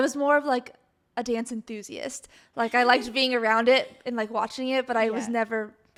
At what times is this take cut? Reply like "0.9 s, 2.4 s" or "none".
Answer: none